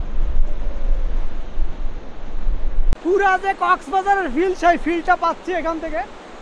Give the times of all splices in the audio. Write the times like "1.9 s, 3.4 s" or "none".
3.0 s